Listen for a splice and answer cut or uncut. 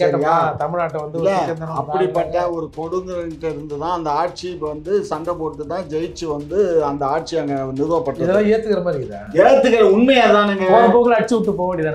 uncut